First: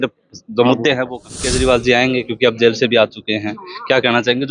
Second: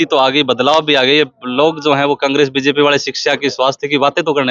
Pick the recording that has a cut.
first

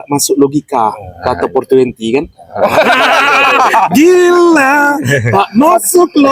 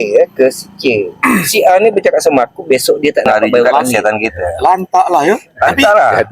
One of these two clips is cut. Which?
second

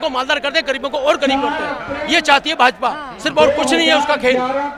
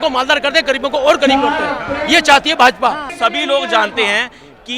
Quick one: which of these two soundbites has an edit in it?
second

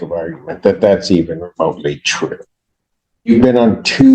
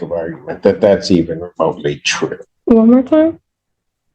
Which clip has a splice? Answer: second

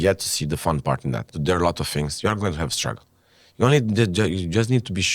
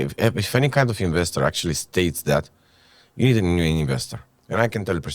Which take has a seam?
first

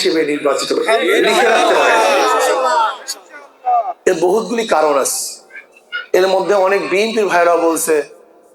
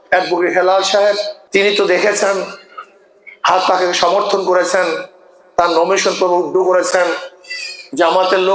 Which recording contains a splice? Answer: second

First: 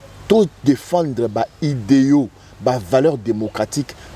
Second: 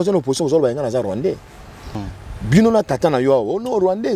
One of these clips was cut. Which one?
second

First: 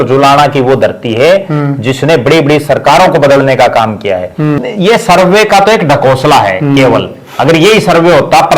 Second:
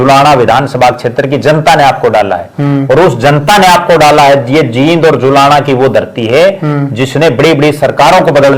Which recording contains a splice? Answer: first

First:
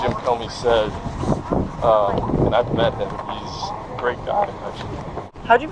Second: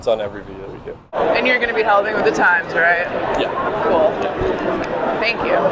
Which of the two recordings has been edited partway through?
second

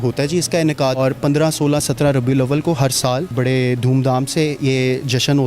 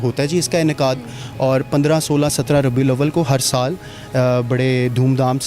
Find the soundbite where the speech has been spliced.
first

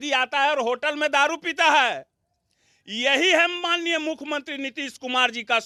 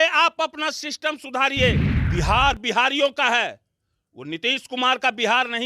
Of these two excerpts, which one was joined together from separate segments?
second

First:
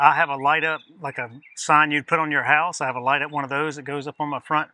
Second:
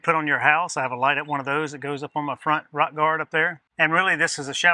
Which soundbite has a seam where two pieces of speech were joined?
second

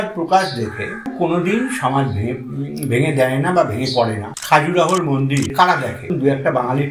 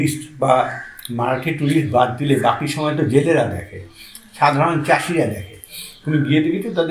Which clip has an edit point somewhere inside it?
first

